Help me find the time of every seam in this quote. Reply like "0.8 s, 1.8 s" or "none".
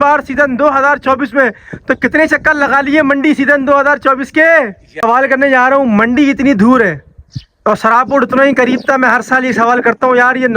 5.0 s